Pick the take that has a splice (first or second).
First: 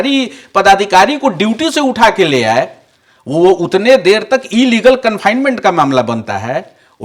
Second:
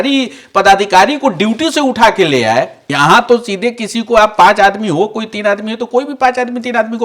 second